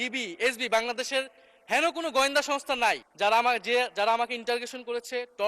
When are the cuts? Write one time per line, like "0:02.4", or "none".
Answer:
0:03.1